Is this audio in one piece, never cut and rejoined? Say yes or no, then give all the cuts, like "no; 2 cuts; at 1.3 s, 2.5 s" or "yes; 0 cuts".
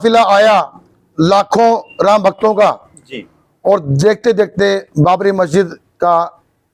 yes; 0 cuts